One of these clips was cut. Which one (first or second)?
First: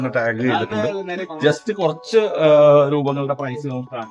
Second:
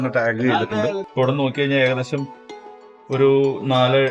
second